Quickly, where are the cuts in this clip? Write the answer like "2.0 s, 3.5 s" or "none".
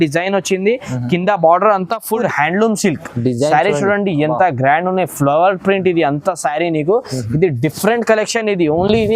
2.2 s